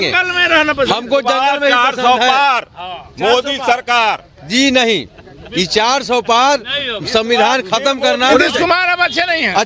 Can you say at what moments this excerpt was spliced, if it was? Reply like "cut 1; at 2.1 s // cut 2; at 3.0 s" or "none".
cut 1; at 8.3 s